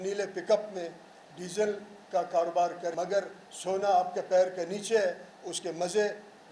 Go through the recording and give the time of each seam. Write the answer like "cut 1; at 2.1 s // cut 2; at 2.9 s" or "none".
cut 1; at 2.8 s